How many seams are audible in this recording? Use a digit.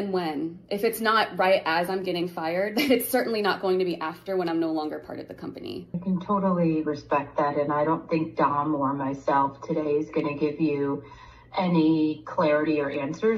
1